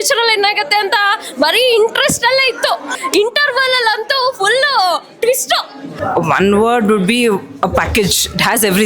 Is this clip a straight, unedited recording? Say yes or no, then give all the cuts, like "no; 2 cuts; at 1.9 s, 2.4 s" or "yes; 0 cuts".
no; 2 cuts; at 2.9 s, 6.0 s